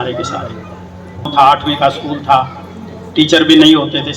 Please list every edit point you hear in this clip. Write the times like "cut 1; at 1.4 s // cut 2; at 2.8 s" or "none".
cut 1; at 1.3 s